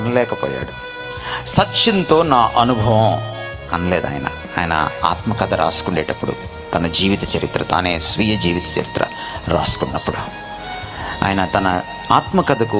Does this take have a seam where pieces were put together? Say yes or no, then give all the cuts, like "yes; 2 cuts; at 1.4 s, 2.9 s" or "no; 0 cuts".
no; 0 cuts